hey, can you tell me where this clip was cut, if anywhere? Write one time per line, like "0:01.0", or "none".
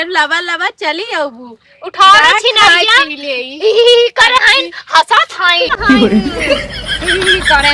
none